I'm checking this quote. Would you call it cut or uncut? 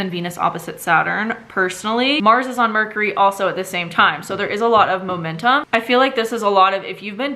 cut